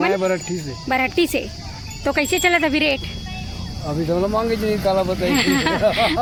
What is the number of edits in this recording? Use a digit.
0